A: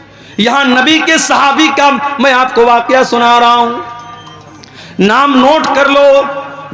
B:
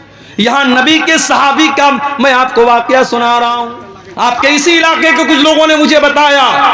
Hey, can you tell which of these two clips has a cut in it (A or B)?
B